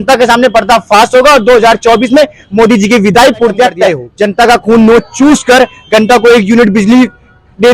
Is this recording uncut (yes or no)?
no